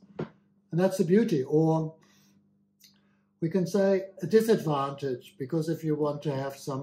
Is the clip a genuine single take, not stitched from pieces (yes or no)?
yes